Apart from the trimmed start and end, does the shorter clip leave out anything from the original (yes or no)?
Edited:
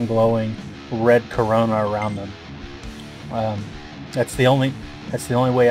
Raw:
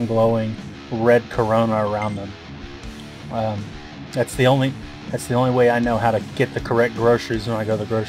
no